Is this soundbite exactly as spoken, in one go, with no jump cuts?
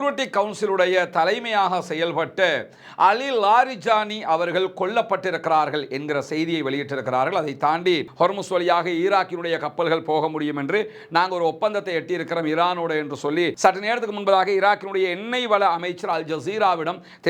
no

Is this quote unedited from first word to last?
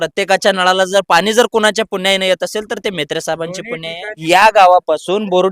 no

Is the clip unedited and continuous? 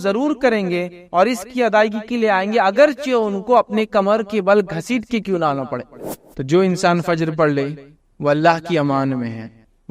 no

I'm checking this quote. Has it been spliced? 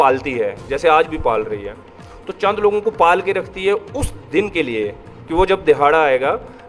no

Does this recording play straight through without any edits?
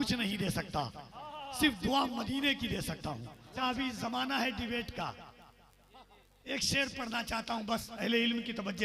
no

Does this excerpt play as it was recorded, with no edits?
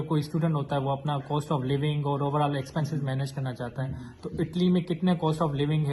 yes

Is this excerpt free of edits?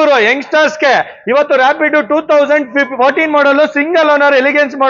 yes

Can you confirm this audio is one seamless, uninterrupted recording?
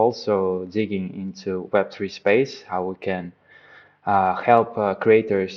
yes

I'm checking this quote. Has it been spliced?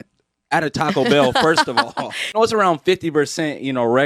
yes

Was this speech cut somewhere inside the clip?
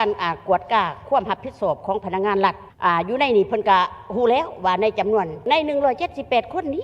yes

